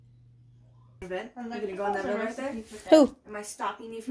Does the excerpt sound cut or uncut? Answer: cut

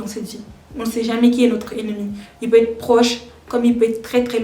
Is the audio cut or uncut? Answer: uncut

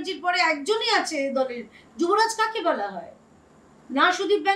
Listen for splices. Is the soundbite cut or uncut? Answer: uncut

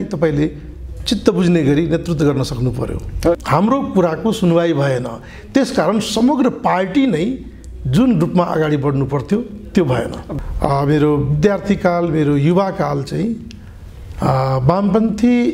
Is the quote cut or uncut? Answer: cut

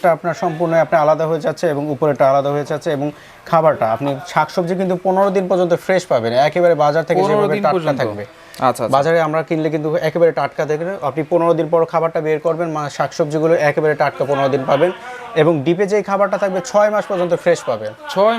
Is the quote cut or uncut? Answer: uncut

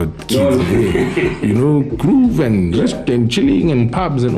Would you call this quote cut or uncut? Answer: uncut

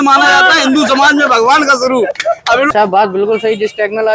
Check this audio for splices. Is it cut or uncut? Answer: cut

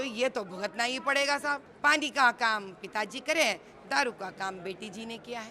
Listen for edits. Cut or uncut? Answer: cut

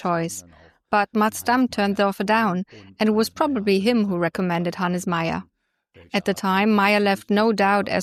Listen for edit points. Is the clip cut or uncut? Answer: uncut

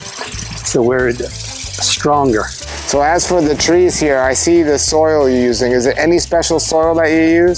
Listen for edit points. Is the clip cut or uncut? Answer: cut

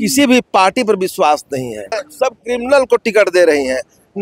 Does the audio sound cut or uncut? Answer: cut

